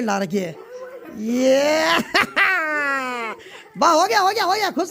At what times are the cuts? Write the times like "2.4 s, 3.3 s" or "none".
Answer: none